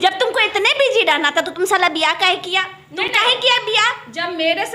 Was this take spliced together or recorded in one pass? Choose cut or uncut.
uncut